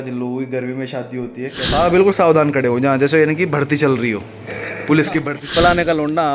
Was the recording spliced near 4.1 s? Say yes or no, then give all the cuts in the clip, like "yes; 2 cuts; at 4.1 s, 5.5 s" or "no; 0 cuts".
no; 2 cuts; at 1.6 s, 5.4 s